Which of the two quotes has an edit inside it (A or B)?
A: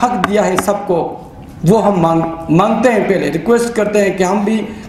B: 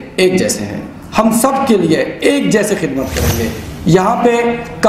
B